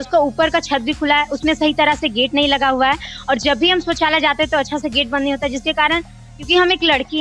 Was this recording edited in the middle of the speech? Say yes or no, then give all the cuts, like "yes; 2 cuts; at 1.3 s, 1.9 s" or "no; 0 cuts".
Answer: no; 0 cuts